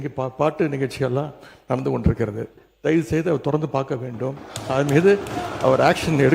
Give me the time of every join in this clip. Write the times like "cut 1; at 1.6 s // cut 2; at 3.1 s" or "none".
cut 1; at 2.6 s